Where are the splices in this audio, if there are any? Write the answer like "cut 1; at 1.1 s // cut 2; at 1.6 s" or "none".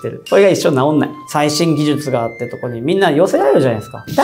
cut 1; at 1.2 s